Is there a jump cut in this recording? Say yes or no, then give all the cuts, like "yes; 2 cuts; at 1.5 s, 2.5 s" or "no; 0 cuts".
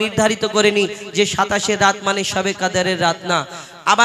no; 0 cuts